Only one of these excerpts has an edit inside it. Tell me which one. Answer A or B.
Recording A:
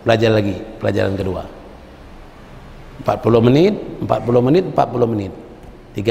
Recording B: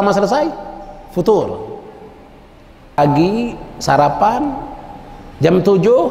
B